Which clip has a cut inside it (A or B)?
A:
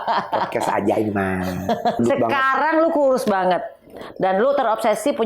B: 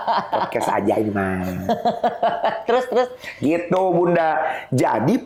A